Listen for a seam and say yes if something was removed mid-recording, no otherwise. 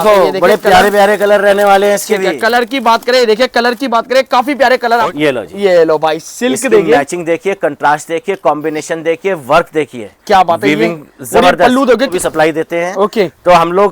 yes